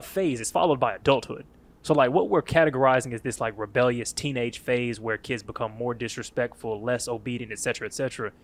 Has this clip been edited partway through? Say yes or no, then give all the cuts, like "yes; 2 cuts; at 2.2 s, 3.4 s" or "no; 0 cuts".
no; 0 cuts